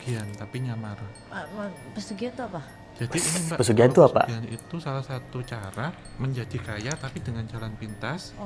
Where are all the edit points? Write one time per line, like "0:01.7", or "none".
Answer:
none